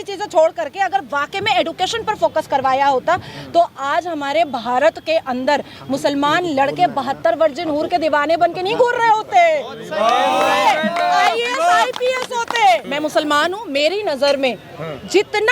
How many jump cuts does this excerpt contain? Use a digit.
1